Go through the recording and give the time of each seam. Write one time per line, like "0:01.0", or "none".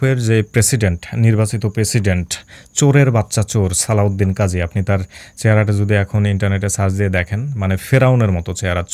none